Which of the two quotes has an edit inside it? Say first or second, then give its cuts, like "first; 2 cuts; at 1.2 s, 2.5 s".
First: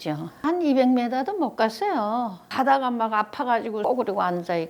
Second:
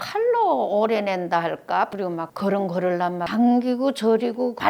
second; 2 cuts; at 1.9 s, 3.3 s